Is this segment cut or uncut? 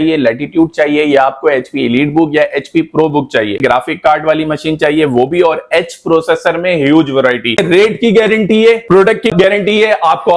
cut